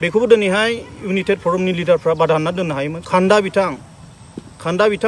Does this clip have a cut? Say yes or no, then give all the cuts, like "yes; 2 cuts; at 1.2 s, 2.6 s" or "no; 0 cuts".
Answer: yes; 1 cut; at 3.0 s